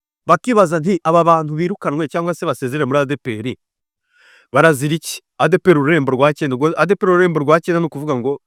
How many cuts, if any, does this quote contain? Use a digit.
0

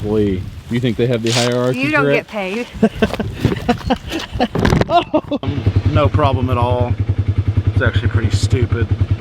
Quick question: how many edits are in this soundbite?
1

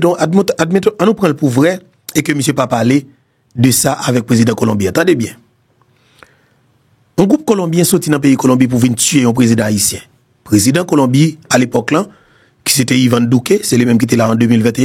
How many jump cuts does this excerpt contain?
0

